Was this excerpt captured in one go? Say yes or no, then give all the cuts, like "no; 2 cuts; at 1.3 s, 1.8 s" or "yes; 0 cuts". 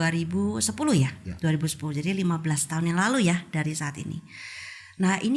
yes; 0 cuts